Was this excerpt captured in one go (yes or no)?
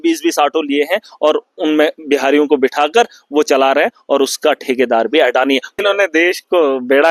no